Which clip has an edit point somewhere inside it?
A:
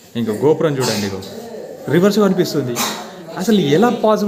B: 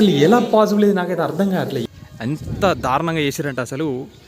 B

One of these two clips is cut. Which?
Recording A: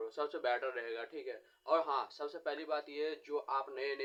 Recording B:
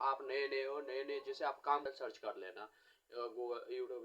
B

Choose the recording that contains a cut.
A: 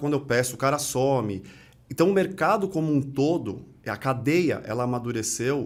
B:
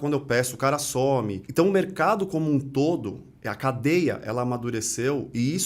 B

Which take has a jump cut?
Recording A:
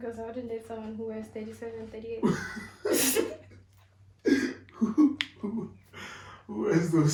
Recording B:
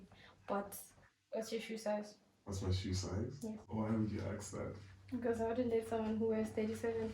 B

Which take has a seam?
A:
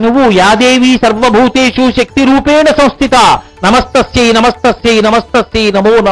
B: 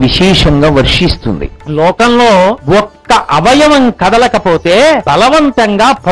B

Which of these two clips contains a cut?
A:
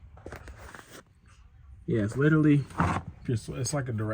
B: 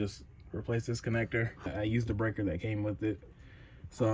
B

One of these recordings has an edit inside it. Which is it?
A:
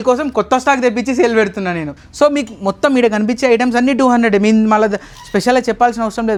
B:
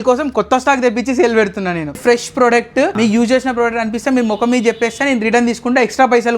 B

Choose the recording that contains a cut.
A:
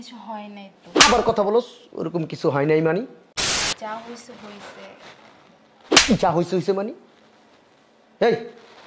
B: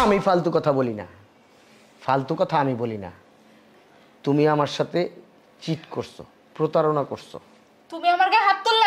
A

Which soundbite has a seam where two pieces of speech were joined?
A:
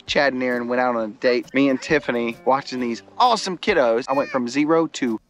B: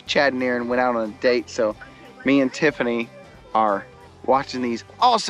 A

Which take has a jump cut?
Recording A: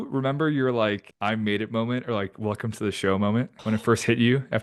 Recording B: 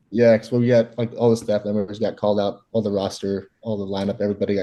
A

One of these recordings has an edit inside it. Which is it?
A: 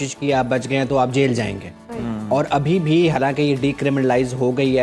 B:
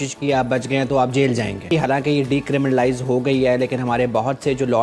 B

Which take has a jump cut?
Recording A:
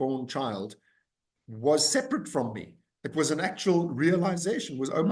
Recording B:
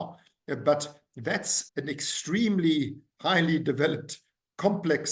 B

